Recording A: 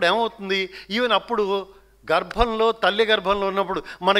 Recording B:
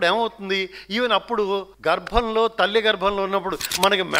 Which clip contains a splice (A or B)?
B